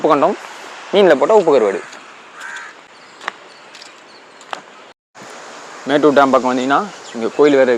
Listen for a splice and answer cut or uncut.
uncut